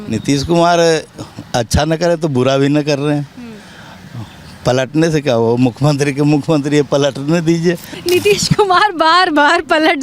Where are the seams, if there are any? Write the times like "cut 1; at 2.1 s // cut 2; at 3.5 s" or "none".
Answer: cut 1; at 7.9 s